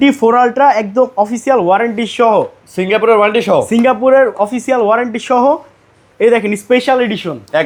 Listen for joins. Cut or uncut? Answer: uncut